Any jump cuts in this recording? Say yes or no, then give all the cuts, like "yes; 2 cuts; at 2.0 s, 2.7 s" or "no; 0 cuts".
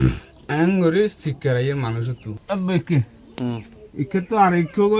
yes; 1 cut; at 2.2 s